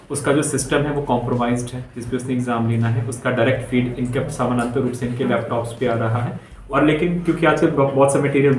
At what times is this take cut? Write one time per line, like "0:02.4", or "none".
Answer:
0:06.5

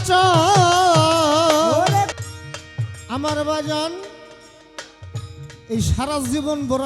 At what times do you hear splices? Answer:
0:02.1

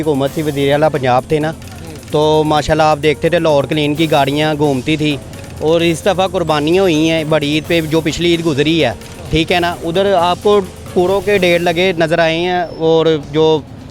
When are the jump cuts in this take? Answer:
none

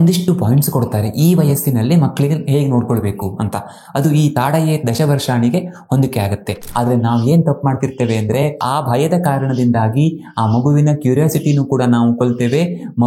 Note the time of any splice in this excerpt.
0:06.6
0:08.6

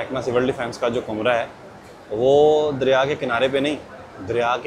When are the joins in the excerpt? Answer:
none

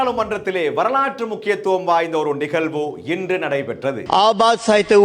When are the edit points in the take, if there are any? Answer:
0:04.0

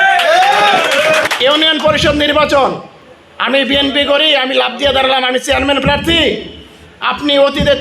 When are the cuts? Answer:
0:01.3

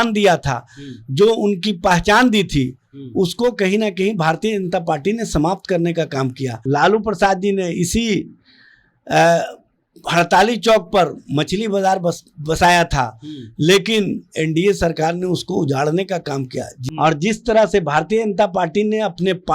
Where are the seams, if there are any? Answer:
0:06.5
0:16.7

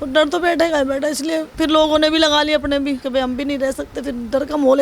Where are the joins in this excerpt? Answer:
0:01.5
0:03.0

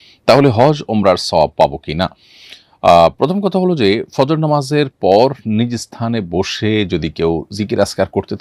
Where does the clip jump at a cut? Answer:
none

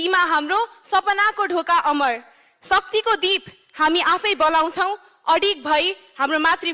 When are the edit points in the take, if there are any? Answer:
none

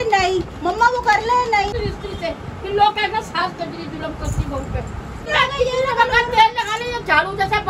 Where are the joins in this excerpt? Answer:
0:01.7
0:04.2
0:05.3

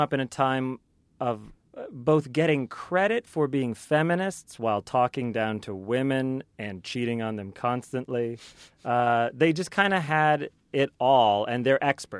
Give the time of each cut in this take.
0:01.5

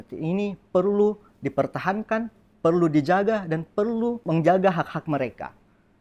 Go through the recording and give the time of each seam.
0:04.2

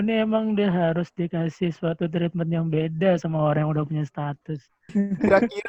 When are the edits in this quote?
0:04.8

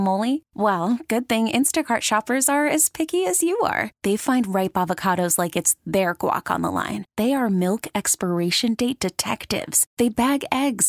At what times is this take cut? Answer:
none

